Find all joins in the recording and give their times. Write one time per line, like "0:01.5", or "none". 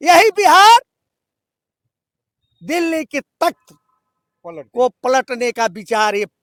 none

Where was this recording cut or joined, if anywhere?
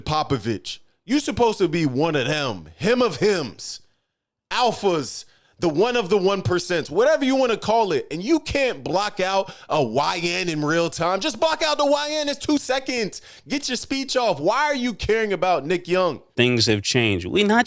0:16.3

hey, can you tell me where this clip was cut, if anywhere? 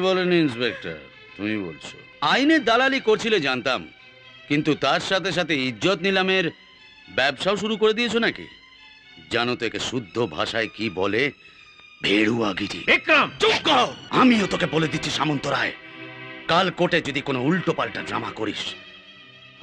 0:02.0
0:14.0

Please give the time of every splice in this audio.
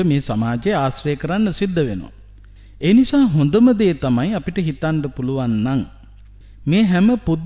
none

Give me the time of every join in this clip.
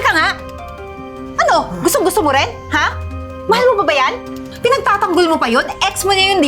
0:04.5

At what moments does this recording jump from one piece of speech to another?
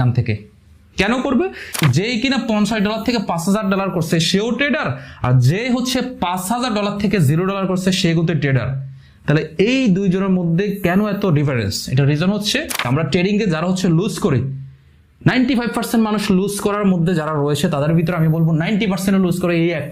0:01.8
0:12.8

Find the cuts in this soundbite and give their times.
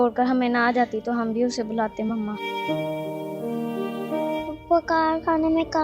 0:02.4
0:04.1

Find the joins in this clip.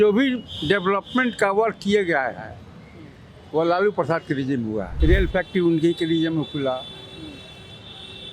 0:04.9

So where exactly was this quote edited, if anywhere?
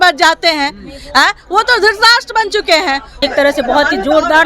0:03.2

